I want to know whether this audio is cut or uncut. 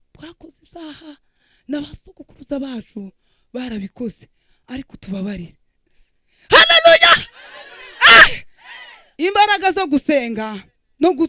uncut